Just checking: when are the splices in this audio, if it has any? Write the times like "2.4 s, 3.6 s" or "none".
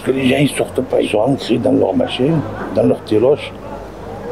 1.1 s